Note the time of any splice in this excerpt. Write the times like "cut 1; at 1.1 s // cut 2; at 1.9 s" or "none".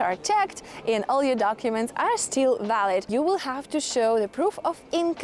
cut 1; at 3.1 s